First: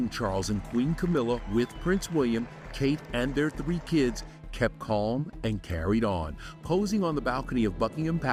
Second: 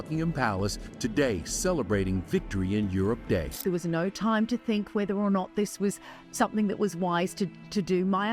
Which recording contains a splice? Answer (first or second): second